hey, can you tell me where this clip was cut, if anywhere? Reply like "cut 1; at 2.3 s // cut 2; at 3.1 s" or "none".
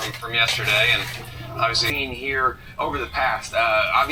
cut 1; at 1.9 s

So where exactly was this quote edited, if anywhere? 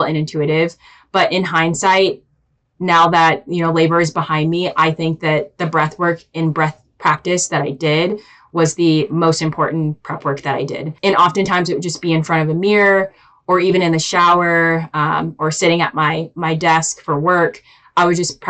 cut 1; at 10.9 s

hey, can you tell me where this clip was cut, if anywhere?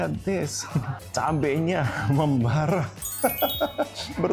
none

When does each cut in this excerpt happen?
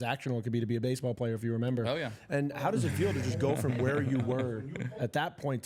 none

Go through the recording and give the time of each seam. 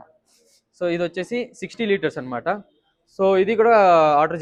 none

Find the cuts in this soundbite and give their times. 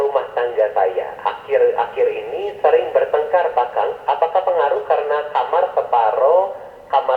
none

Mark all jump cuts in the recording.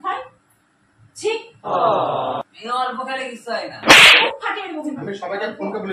none

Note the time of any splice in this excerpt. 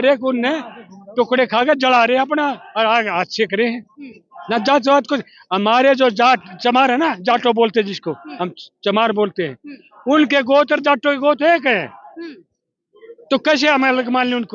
none

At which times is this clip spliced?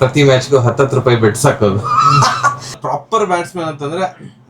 cut 1; at 2.8 s

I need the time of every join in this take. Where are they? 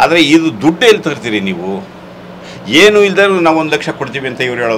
none

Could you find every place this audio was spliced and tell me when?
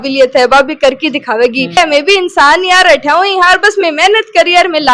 cut 1; at 1.8 s

